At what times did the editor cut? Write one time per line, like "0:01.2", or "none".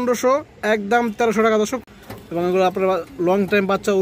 0:01.8